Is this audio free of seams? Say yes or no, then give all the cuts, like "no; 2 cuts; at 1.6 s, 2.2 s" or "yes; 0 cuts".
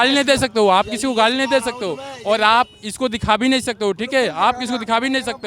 yes; 0 cuts